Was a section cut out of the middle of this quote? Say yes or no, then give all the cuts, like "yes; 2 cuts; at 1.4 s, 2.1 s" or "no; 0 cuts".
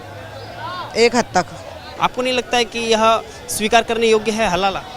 yes; 1 cut; at 1.8 s